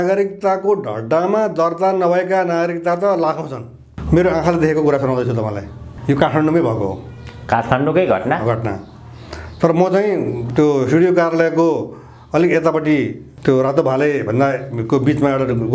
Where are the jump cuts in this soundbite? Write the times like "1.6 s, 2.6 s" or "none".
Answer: 3.9 s, 10.4 s, 13.2 s